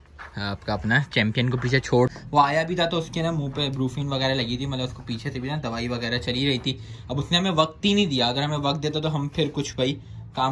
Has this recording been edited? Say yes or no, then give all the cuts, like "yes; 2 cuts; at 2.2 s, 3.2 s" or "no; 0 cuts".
yes; 1 cut; at 2.1 s